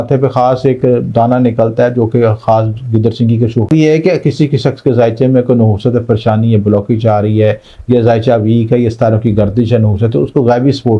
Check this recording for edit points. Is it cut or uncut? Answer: cut